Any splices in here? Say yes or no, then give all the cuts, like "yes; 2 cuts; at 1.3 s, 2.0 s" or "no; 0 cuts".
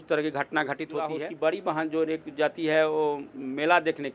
yes; 1 cut; at 1.2 s